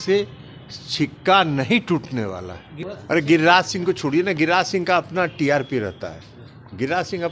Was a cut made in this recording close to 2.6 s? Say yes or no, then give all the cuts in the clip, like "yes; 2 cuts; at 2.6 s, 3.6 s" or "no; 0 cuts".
yes; 1 cut; at 2.6 s